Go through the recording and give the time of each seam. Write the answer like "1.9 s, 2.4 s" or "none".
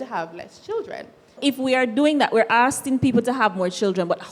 1.3 s